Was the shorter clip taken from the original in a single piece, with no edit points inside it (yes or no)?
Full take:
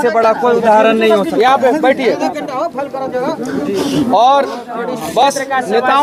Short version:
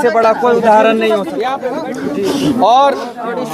no